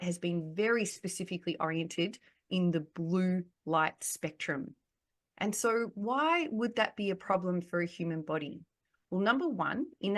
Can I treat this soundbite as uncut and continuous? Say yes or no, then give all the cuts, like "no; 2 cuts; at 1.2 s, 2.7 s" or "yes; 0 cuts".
yes; 0 cuts